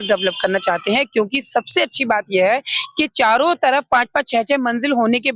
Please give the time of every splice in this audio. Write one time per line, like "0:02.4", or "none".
none